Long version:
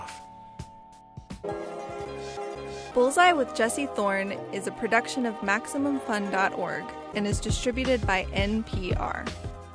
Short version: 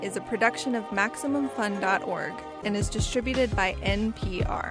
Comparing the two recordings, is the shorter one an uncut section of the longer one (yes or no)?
yes